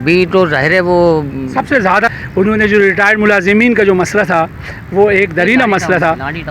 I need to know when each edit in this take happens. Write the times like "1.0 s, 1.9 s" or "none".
1.9 s